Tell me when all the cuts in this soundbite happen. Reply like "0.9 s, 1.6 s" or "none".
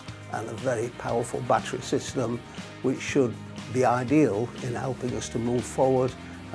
none